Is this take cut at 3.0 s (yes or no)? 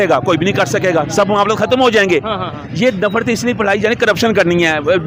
no